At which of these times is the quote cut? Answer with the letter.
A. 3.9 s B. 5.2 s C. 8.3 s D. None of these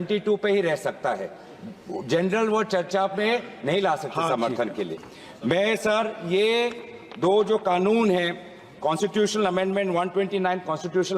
D